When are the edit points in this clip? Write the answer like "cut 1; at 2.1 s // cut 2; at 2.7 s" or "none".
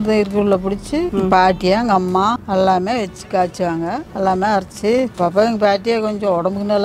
cut 1; at 1.1 s // cut 2; at 2.4 s // cut 3; at 4.0 s // cut 4; at 5.1 s